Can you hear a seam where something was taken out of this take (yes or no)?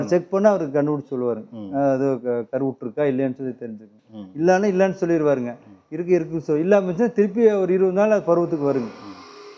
no